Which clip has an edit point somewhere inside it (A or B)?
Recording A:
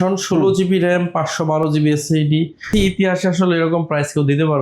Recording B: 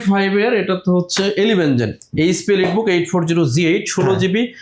A